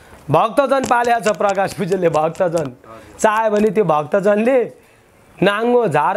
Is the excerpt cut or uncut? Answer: uncut